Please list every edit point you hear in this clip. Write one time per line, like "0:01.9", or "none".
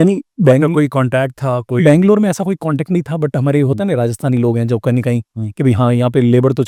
none